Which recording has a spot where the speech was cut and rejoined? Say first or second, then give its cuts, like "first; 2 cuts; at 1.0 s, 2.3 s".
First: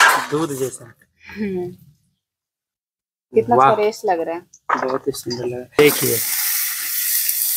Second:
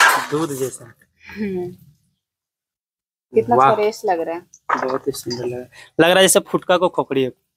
first; 1 cut; at 5.8 s